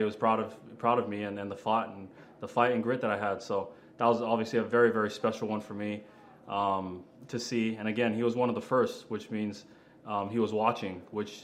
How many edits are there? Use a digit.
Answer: 0